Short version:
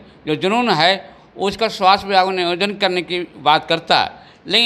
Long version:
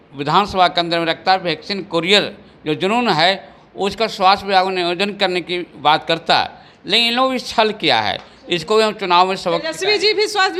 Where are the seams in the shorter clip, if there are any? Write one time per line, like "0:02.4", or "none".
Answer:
none